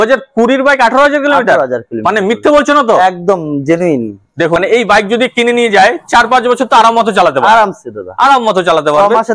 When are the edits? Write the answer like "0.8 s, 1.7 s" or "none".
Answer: 4.6 s